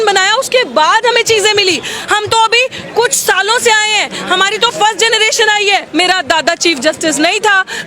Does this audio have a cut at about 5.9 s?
yes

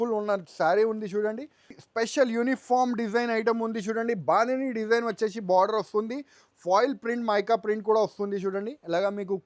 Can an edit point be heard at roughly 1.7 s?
yes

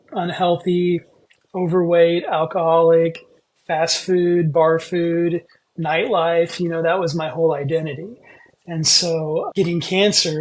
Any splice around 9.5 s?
yes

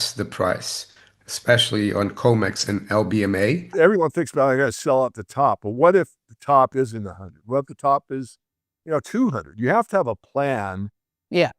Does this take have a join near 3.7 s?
yes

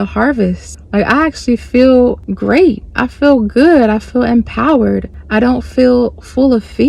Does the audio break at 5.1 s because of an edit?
no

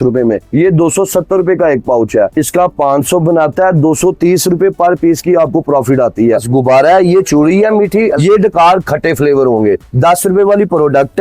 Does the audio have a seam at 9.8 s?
no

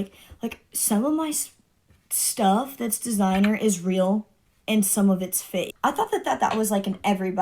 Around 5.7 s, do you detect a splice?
yes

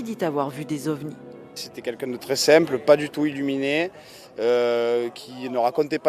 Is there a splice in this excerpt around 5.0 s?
yes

